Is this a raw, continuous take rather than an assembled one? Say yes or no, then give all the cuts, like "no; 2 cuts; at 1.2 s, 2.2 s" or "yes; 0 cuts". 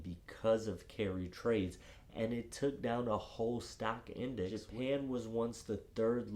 no; 1 cut; at 4.7 s